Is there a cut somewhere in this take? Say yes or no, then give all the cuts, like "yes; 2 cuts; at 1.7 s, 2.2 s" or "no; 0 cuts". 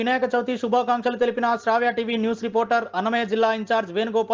no; 0 cuts